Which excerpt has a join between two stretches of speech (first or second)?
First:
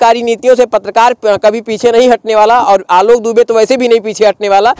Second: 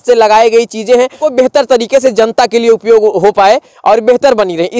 second